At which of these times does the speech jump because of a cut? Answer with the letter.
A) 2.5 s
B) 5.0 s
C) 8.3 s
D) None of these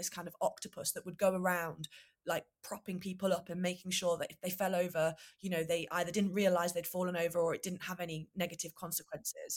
D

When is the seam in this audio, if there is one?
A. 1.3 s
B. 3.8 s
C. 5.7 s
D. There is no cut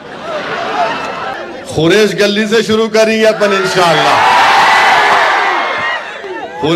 A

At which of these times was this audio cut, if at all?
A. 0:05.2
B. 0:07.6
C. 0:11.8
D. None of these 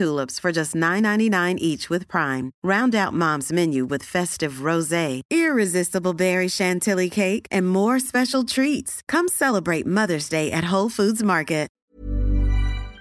C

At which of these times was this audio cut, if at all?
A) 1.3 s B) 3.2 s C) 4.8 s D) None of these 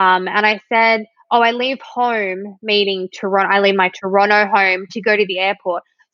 D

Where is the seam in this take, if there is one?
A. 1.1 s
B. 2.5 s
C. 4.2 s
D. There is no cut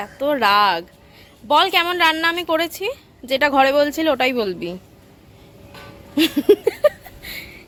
D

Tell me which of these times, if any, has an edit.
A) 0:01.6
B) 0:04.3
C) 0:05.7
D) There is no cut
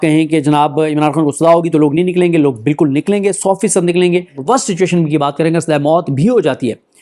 B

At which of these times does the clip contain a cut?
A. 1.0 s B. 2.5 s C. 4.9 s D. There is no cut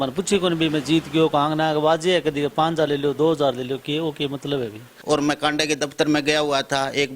C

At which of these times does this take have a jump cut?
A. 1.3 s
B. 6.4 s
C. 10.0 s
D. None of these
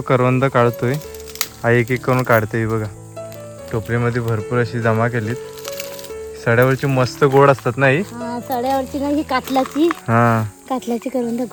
D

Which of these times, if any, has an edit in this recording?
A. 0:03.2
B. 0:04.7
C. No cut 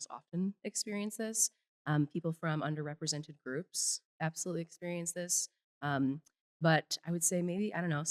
C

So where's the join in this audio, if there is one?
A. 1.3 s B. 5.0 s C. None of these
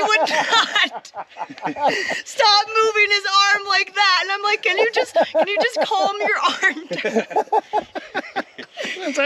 C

